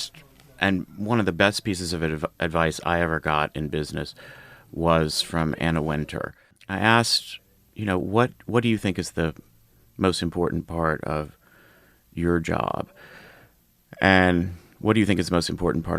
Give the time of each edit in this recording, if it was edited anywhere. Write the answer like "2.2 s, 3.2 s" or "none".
6.6 s